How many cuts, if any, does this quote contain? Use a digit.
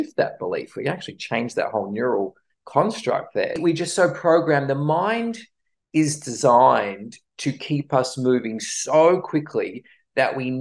1